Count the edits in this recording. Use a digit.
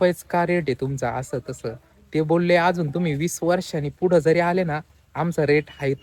0